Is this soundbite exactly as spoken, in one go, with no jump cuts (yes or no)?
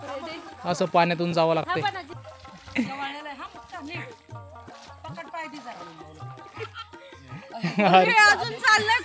no